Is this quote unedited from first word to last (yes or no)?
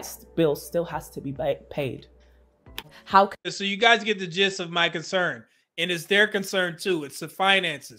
yes